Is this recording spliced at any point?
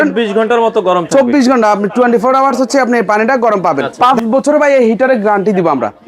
yes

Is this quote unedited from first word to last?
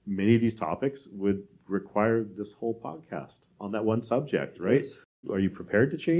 no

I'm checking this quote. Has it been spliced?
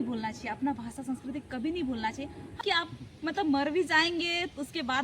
yes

